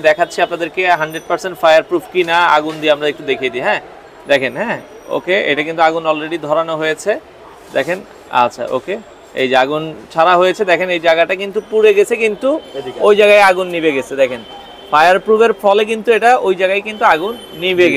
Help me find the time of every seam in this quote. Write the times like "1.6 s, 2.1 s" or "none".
none